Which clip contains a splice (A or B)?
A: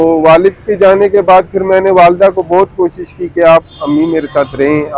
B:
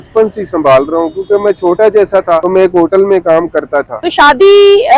B